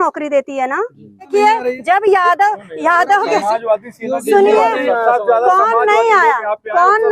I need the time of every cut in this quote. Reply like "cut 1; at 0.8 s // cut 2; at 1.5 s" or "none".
cut 1; at 1.3 s